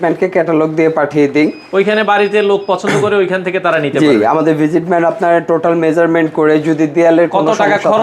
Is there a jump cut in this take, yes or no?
no